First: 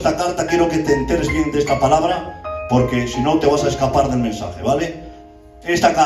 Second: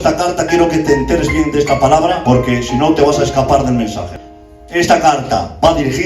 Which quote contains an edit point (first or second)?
second